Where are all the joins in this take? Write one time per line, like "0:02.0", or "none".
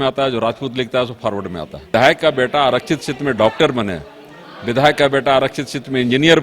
0:01.9